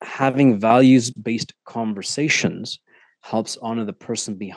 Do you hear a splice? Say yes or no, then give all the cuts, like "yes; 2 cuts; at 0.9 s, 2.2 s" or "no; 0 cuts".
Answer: no; 0 cuts